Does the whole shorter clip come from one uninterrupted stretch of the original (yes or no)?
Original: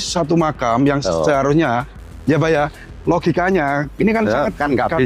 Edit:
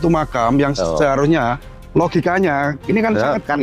no